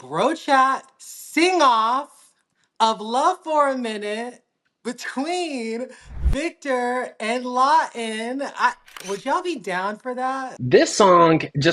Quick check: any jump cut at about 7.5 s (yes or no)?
no